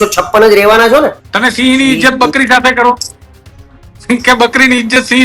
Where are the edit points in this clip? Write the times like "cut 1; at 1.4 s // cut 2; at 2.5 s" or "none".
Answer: cut 1; at 1.3 s

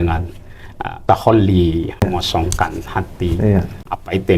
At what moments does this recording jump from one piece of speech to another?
cut 1; at 2.0 s

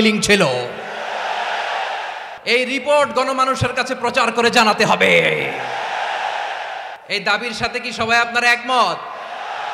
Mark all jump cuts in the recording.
cut 1; at 2.3 s // cut 2; at 7.0 s

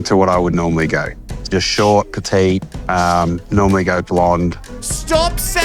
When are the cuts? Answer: cut 1; at 4.6 s

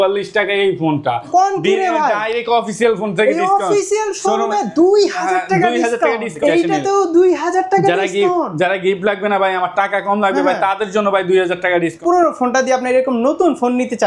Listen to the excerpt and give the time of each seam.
cut 1; at 1.3 s // cut 2; at 6.3 s // cut 3; at 12.0 s

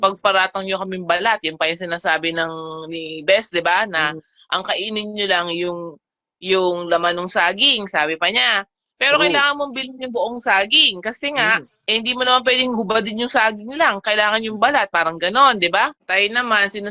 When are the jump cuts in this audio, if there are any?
cut 1; at 16.0 s

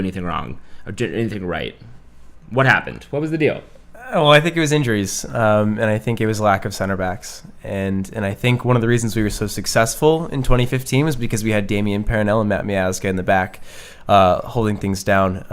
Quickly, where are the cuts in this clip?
cut 1; at 1.3 s

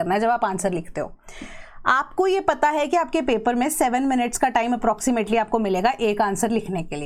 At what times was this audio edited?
none

